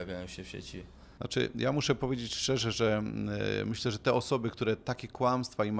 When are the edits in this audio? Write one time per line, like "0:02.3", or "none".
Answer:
none